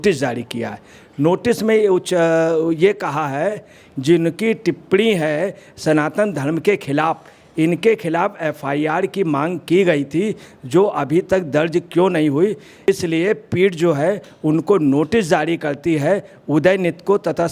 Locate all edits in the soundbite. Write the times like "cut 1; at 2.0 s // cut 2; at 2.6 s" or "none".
cut 1; at 3.8 s